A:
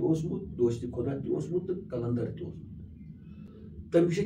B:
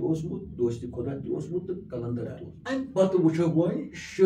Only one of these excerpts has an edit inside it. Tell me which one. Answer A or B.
B